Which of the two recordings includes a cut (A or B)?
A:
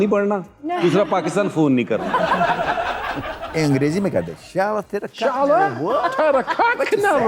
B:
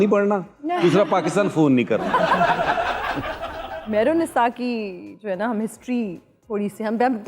A